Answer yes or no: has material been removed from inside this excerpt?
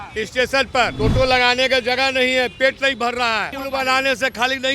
yes